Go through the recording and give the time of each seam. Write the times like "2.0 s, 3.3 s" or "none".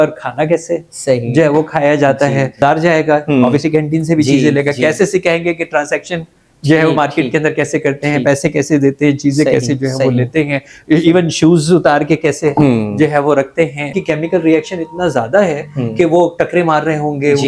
2.6 s, 13.9 s